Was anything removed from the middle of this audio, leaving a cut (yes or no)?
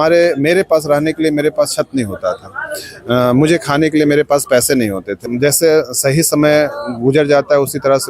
yes